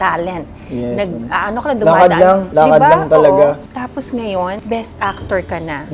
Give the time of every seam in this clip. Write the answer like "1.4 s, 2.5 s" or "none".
3.6 s, 4.6 s